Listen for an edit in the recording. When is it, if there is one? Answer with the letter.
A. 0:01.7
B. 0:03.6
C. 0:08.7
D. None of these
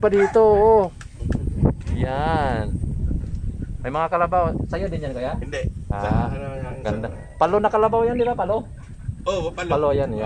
D